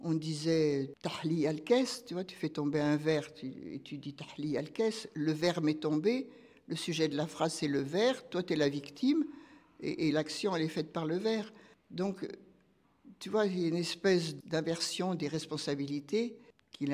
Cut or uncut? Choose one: uncut